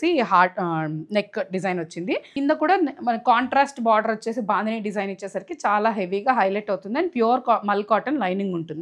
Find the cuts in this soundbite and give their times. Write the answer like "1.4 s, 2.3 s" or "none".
2.3 s